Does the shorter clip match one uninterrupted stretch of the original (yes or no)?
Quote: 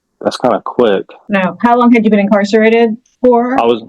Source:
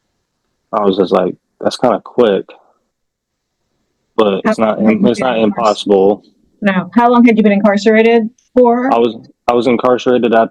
no